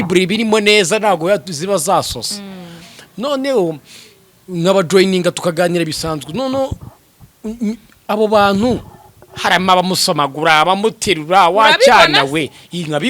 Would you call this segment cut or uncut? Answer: uncut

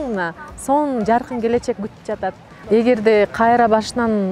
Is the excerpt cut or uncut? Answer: cut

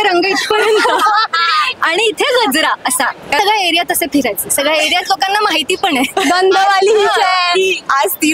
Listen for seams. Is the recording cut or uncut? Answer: cut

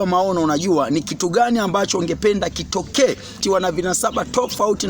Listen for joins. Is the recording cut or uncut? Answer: cut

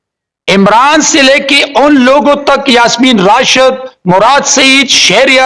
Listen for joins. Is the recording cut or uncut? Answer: uncut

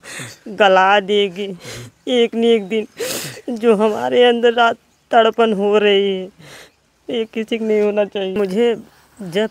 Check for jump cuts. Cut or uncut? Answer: cut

